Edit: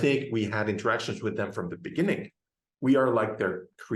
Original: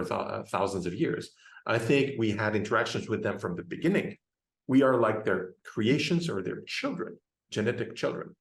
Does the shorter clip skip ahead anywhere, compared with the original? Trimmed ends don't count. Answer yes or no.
no